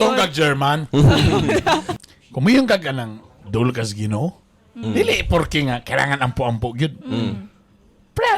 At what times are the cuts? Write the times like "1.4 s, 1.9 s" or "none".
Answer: 1.9 s